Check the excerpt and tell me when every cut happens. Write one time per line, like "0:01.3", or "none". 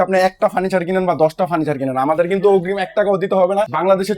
none